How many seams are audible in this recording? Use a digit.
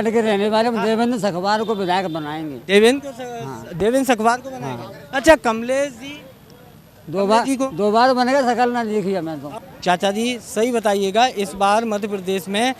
1